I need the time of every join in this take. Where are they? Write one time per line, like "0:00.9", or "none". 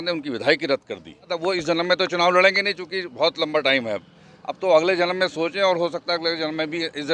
0:01.3